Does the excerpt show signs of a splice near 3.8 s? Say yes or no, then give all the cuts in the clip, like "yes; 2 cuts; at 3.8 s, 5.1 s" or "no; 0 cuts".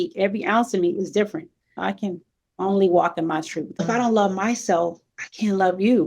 yes; 2 cuts; at 1.7 s, 3.8 s